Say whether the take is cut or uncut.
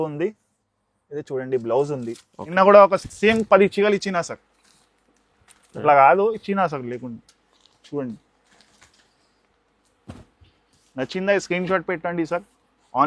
cut